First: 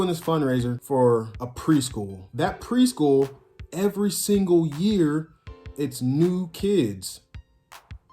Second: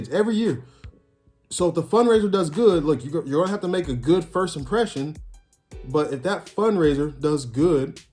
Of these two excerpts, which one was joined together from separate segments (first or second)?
first